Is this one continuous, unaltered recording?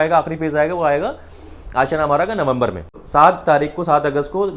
no; 1 cut; at 2.9 s

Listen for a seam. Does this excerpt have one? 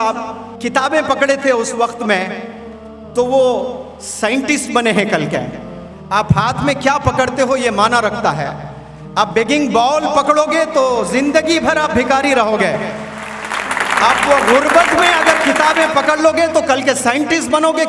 no; 0 cuts

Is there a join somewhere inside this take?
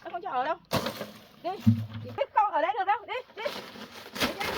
yes; 1 cut; at 2.2 s

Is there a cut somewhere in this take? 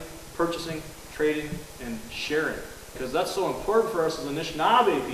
yes; 1 cut; at 2.9 s

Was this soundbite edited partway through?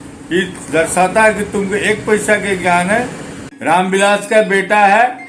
yes; 1 cut; at 3.4 s

